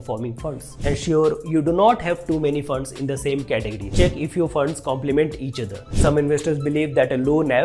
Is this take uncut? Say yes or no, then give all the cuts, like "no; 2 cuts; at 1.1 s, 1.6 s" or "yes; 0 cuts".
no; 3 cuts; at 0.9 s, 4.1 s, 6.1 s